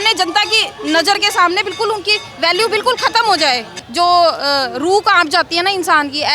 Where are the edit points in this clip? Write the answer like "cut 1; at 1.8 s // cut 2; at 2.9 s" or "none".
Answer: cut 1; at 3.8 s